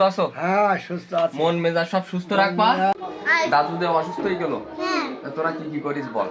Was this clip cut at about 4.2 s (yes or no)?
no